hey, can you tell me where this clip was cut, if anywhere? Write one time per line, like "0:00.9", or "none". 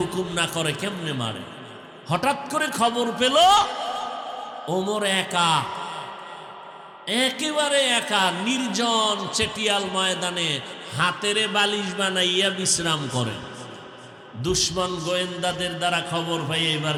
none